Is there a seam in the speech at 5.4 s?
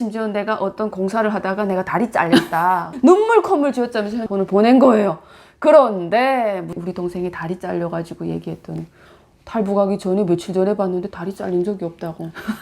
no; 4 cuts; at 2.9 s, 4.2 s, 6.7 s, 9.0 s

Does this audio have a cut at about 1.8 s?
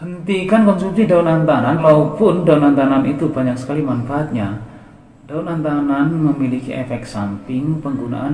yes; 1 cut; at 1.8 s

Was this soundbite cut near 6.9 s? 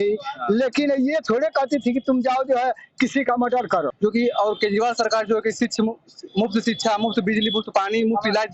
no; 1 cut; at 3.9 s

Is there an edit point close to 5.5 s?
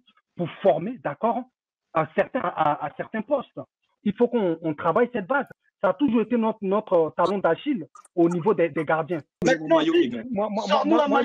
yes; 3 cuts; at 3.8 s, 5.5 s, 9.4 s

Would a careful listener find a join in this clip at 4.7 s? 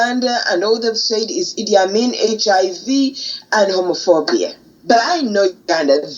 yes; 1 cut; at 4.7 s

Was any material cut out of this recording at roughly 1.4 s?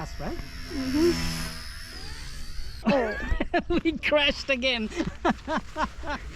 no; 1 cut; at 2.8 s

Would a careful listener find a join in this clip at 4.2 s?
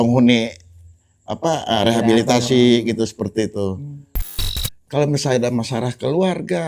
yes; 1 cut; at 4.2 s

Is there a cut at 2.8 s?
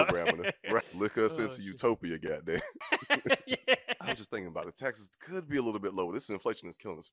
yes; 3 cuts; at 0.9 s, 2.8 s, 4.1 s

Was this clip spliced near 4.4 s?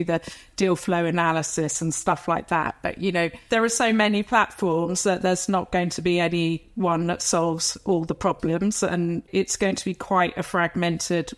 no; 1 cut; at 9.2 s

